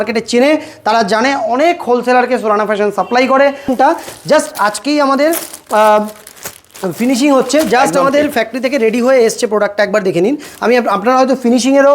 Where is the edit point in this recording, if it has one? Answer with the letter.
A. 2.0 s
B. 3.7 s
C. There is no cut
B